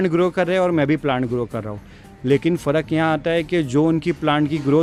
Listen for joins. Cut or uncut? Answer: uncut